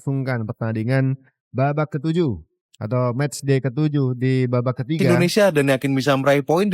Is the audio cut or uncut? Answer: cut